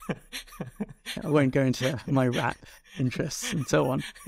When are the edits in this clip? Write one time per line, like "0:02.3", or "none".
none